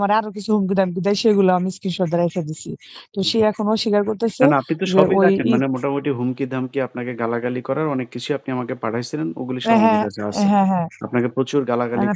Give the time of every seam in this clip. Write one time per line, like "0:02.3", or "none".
none